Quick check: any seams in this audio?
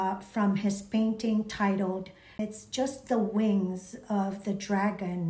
yes; 1 cut; at 2.4 s

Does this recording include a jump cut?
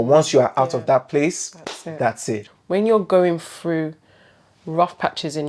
yes; 1 cut; at 2.5 s

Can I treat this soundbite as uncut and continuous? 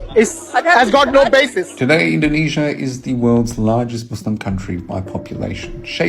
no; 1 cut; at 1.7 s

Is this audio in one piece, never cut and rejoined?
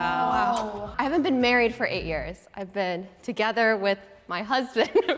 yes; 0 cuts

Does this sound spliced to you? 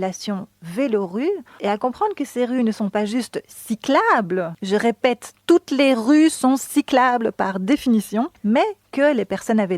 yes; 3 cuts; at 1.5 s, 4.6 s, 8.3 s

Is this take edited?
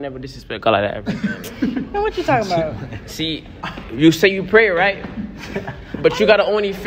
no; 0 cuts

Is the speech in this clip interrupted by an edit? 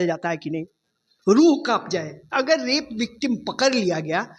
yes; 1 cut; at 2.3 s

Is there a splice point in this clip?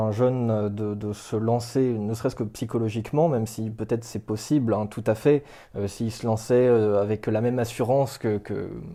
no; 0 cuts

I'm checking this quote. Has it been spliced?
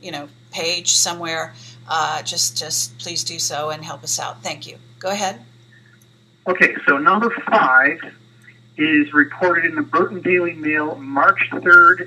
yes; 1 cut; at 4.4 s

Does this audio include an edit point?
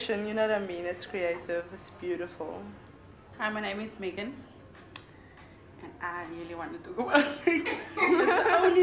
yes; 1 cut; at 2.8 s

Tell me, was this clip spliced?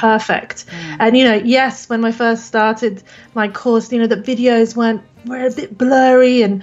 no; 0 cuts

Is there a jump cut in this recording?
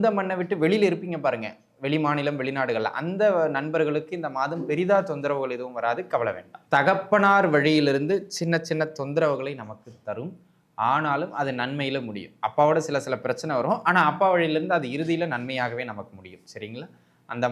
yes; 1 cut; at 6.5 s

